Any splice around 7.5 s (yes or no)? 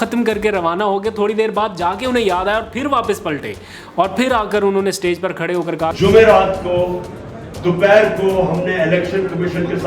no